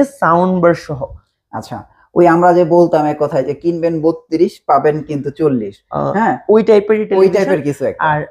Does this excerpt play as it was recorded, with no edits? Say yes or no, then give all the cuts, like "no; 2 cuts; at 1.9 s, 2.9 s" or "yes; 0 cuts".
yes; 0 cuts